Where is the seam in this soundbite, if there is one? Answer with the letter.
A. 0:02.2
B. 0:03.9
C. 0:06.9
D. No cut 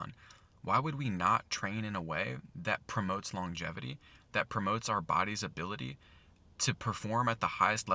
D